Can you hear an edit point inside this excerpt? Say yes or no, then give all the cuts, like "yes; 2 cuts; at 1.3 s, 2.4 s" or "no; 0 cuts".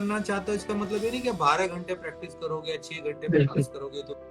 no; 0 cuts